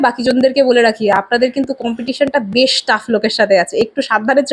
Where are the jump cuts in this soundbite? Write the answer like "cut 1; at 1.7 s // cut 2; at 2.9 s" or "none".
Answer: none